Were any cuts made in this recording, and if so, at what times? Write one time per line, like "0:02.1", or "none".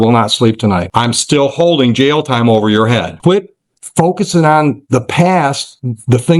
0:00.9
0:03.1

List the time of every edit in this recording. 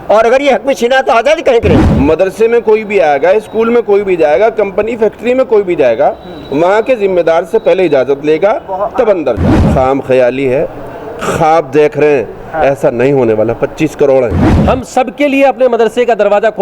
0:01.8
0:09.5
0:14.5

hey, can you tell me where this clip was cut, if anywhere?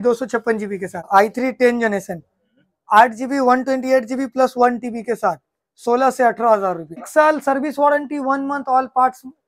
0:01.1
0:07.1

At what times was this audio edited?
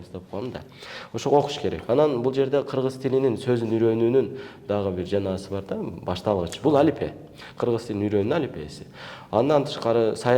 none

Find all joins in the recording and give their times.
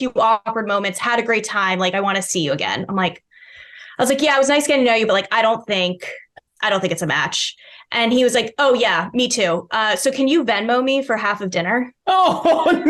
none

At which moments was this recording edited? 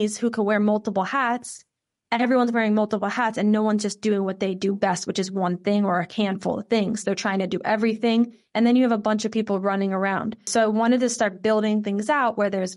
0:10.5

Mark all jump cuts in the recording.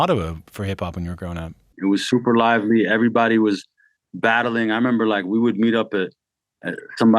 0:01.7

